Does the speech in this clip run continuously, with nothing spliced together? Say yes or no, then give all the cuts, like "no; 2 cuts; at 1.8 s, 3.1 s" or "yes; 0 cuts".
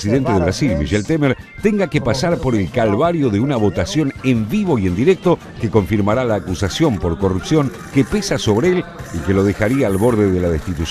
no; 1 cut; at 9.5 s